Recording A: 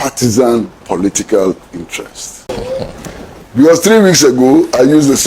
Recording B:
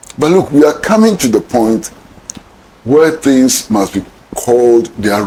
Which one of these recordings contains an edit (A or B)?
A